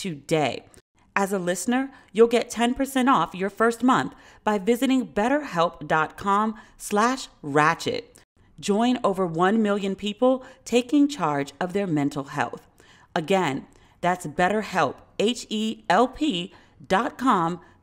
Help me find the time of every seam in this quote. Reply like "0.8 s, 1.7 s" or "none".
none